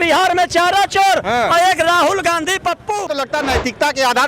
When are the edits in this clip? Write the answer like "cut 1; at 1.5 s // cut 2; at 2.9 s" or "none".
cut 1; at 3.1 s